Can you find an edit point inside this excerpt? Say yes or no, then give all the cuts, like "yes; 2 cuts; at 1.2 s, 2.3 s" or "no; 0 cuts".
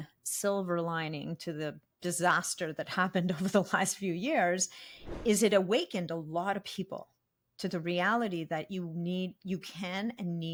no; 0 cuts